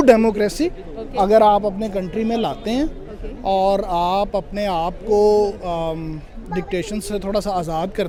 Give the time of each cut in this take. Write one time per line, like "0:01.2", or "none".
none